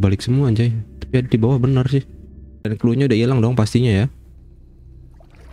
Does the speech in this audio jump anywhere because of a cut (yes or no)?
yes